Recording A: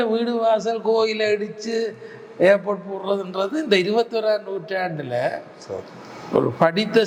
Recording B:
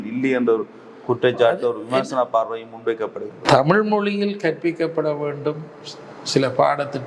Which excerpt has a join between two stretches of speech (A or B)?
B